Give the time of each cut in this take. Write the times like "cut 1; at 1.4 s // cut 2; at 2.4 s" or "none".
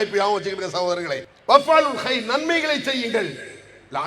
cut 1; at 1.3 s